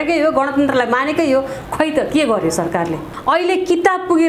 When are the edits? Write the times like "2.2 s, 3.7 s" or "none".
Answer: 3.1 s